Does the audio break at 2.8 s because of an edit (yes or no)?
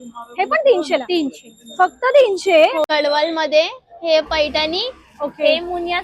yes